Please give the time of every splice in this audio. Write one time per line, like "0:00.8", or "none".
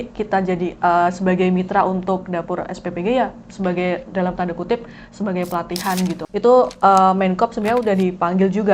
0:06.2

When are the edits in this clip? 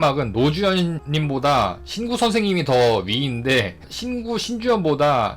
0:01.0

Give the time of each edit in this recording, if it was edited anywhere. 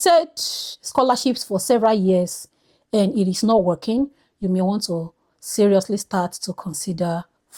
none

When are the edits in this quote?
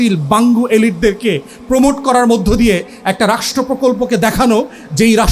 none

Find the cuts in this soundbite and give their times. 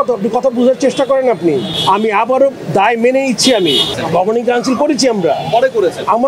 0:01.7
0:03.9

